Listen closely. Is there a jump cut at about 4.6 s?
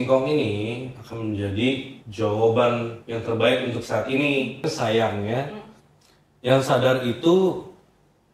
yes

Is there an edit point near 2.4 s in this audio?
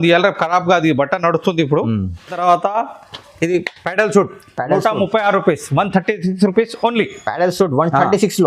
yes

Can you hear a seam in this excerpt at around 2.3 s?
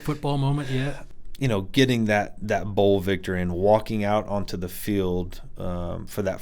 no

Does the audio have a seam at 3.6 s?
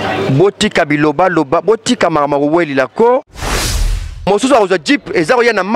yes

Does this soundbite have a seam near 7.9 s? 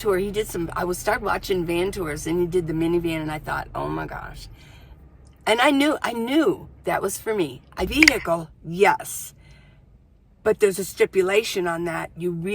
yes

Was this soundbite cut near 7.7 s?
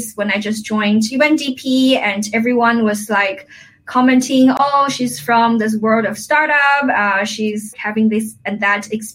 yes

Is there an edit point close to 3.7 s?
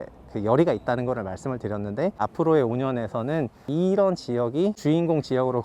yes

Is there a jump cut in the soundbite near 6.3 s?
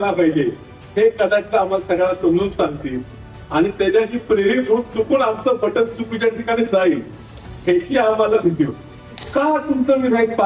no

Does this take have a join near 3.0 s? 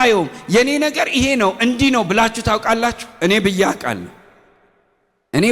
no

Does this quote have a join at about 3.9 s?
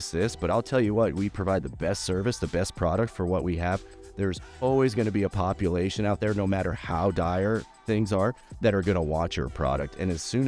no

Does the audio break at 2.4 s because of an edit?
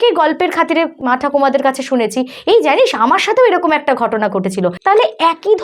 no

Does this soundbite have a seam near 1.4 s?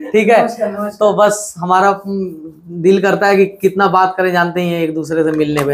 no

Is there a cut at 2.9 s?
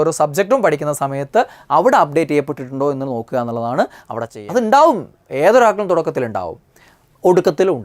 no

